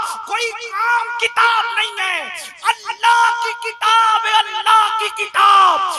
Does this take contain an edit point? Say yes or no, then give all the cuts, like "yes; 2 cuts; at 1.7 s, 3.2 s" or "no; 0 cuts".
no; 0 cuts